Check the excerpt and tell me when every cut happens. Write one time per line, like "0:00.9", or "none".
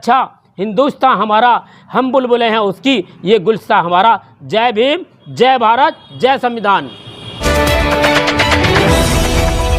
0:07.4